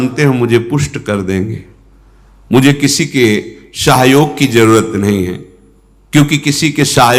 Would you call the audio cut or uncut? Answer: uncut